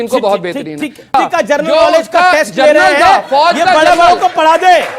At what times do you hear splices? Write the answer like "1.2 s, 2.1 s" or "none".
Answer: 1.1 s